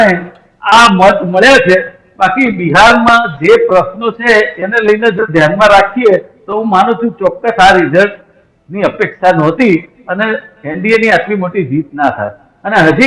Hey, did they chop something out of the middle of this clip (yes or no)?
no